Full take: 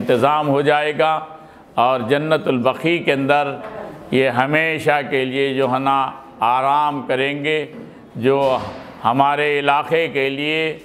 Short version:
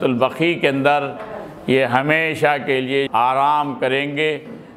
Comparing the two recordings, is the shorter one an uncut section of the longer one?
no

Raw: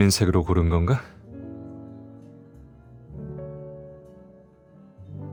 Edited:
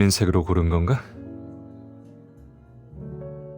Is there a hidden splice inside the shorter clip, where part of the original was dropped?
yes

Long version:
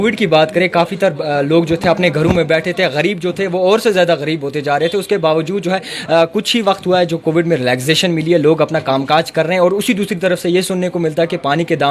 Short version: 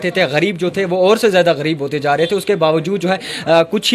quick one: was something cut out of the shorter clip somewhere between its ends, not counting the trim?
no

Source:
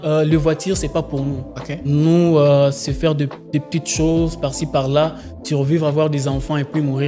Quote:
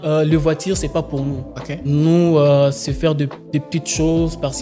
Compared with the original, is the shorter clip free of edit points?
yes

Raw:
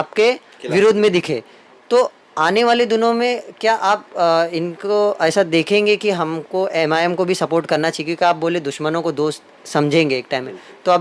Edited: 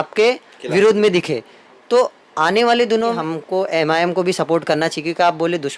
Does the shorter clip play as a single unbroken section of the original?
no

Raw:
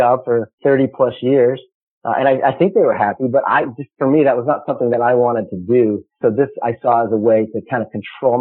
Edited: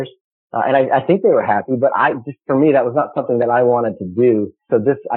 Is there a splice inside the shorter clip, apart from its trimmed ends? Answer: no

